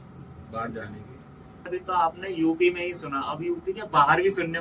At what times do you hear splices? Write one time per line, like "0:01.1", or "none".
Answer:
0:01.7